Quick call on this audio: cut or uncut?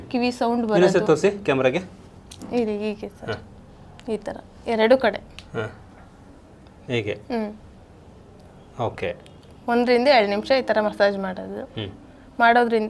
uncut